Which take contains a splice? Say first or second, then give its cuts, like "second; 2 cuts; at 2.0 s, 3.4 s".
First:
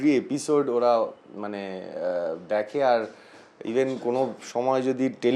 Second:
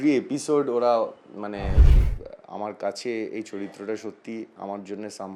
second; 1 cut; at 1.8 s